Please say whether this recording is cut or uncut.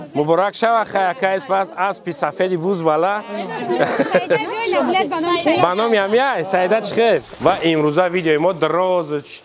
cut